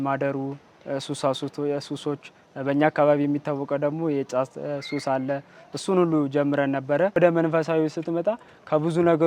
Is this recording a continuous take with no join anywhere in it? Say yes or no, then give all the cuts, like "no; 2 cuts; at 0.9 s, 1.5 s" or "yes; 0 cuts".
no; 1 cut; at 7.2 s